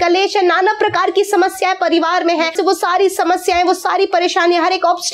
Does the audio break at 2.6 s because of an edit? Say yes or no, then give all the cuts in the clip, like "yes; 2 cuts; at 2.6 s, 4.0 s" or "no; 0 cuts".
yes; 1 cut; at 2.6 s